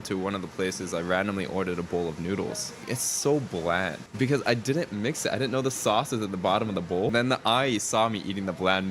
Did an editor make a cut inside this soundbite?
yes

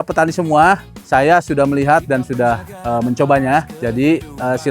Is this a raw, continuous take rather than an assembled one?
no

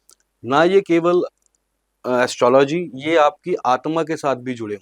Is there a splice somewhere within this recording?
no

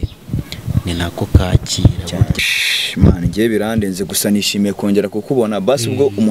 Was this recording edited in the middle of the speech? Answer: yes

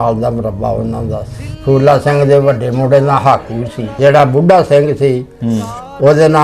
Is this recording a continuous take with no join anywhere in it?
no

